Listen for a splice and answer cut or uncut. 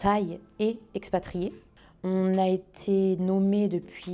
cut